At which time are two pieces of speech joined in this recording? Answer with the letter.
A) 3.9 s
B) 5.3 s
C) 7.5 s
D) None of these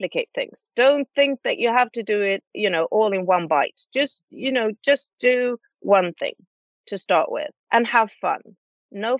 C